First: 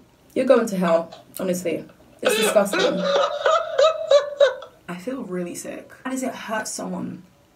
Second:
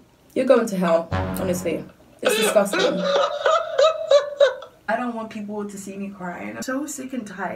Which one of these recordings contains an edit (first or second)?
second